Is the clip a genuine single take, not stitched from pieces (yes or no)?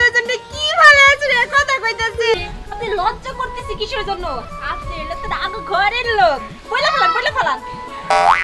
no